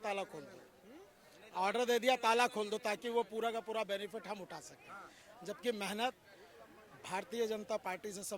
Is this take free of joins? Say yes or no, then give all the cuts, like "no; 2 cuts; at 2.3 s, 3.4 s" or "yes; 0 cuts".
yes; 0 cuts